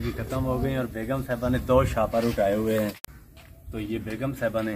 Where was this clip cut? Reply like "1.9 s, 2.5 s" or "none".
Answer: 3.1 s